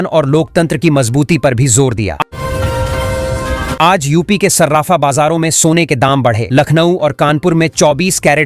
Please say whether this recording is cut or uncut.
cut